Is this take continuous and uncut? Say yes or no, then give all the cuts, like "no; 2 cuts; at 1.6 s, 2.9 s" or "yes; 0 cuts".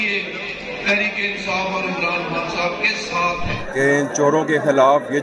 no; 1 cut; at 3.6 s